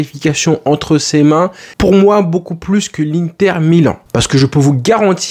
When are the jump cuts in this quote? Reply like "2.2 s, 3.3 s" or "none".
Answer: 4.0 s